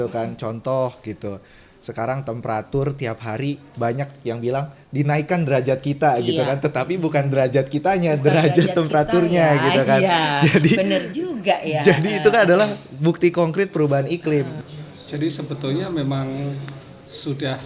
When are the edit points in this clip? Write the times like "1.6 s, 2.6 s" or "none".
14.6 s